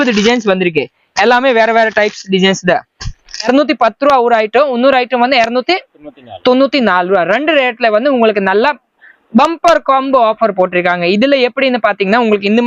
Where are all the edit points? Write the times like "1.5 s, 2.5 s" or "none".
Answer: 3.5 s